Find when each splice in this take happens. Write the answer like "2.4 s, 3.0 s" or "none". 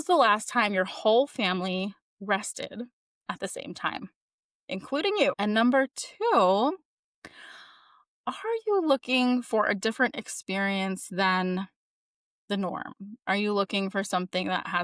none